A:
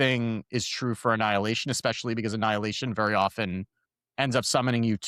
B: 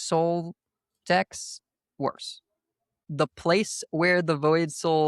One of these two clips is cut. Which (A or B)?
B